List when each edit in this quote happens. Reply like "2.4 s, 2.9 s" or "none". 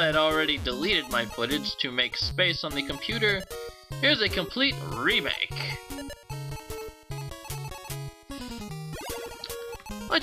none